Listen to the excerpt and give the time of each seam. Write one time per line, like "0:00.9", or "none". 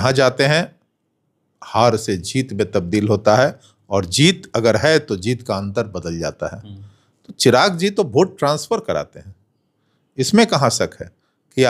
none

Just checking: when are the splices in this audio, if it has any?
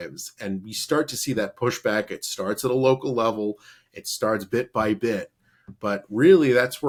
none

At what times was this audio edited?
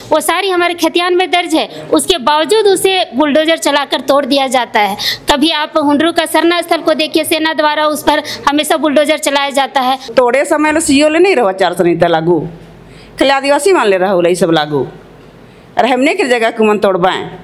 0:10.1

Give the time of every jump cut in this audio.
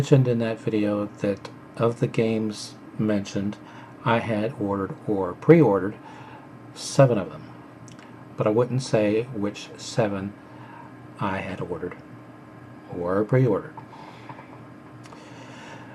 0:08.7

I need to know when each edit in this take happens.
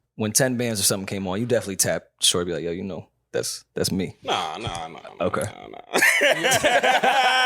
0:04.2

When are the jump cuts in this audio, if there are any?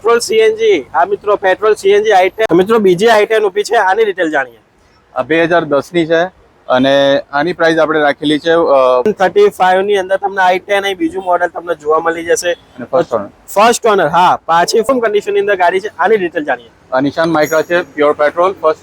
0:02.5
0:09.1
0:14.9

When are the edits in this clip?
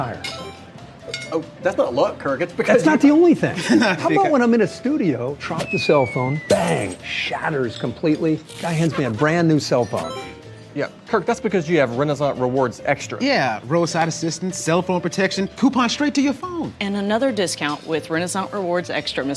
none

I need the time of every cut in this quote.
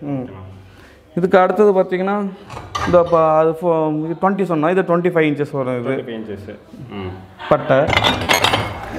0:07.9

